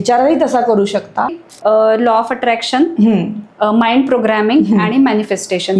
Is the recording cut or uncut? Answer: cut